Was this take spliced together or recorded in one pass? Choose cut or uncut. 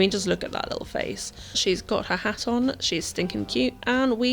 cut